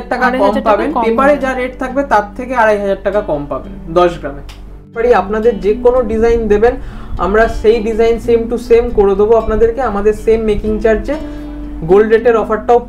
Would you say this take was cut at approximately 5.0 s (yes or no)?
yes